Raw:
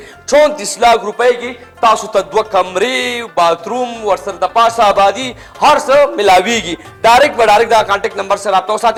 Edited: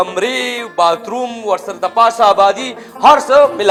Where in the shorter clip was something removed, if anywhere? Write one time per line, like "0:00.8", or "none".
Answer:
none